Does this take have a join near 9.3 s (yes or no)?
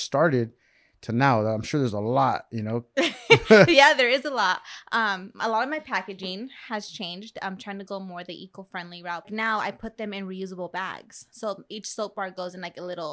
yes